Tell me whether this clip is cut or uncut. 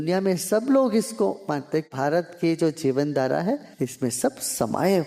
cut